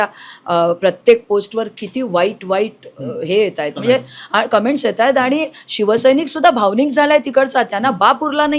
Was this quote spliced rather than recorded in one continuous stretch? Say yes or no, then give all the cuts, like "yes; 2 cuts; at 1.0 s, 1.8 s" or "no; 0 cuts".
no; 0 cuts